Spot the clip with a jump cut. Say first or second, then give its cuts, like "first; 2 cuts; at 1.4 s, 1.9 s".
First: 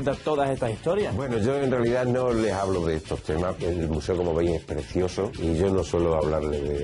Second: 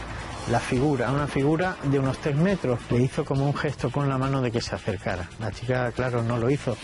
first; 2 cuts; at 3.6 s, 5.4 s